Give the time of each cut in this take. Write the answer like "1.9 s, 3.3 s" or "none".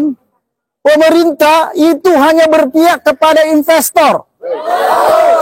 none